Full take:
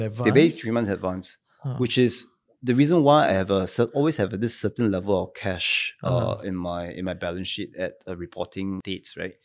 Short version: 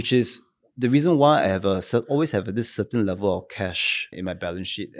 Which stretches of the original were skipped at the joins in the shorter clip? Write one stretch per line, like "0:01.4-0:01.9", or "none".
0:06.0-0:06.9